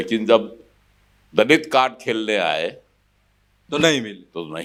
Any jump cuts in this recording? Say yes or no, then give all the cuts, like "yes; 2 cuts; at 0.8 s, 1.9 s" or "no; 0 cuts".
no; 0 cuts